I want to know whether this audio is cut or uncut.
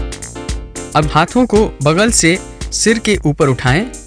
cut